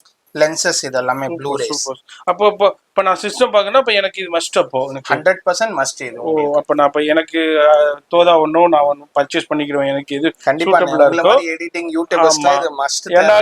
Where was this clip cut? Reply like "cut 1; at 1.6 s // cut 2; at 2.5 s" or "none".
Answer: none